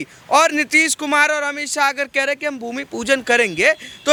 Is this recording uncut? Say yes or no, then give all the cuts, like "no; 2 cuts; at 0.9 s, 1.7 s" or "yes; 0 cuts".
yes; 0 cuts